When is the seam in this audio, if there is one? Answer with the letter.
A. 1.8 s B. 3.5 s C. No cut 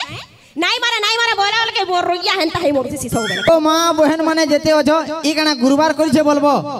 B